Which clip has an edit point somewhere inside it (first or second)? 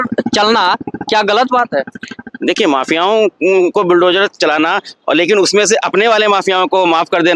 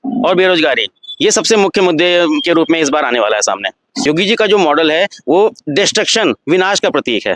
second